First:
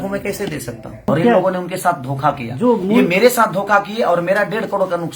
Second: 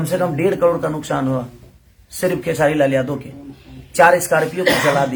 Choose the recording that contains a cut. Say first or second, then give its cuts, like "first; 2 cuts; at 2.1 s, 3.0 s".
first; 1 cut; at 1.1 s